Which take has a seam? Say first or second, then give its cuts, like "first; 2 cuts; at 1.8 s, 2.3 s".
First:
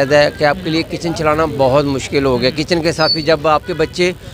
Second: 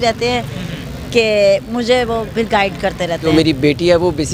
second; 1 cut; at 3.2 s